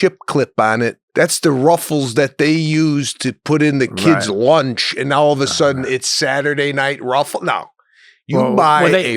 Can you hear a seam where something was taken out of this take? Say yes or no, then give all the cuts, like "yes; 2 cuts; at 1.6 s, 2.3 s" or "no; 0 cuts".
yes; 1 cut; at 1.0 s